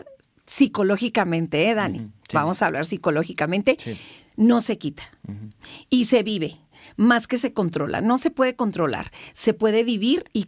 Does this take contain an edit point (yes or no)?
no